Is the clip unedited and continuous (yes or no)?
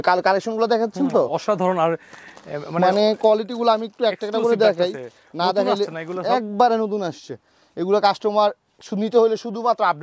yes